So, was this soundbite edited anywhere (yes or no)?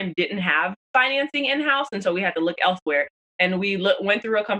no